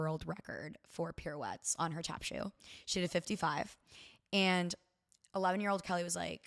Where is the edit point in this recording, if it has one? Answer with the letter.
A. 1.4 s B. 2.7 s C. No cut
C